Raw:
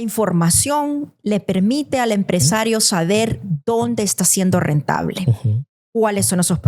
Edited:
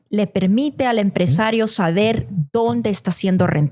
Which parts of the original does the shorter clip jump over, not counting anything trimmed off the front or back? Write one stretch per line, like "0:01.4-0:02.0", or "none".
none